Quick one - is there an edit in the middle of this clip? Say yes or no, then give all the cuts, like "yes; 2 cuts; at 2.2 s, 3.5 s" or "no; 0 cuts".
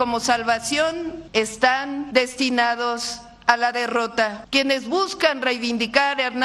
yes; 3 cuts; at 1.2 s, 2.1 s, 4.4 s